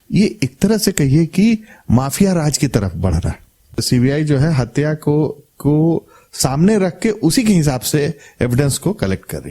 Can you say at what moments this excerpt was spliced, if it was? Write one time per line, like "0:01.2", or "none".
0:03.8